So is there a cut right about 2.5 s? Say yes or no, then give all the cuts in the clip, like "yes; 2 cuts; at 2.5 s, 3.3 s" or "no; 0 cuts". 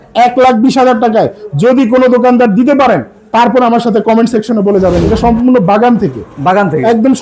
no; 1 cut; at 5.0 s